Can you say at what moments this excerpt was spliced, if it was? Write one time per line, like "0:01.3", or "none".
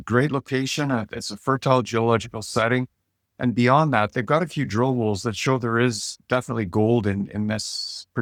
none